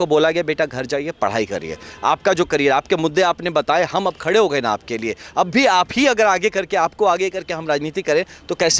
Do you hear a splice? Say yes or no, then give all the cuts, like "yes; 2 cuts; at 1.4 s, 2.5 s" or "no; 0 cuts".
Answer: no; 0 cuts